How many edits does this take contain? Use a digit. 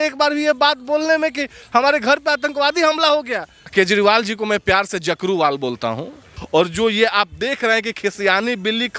2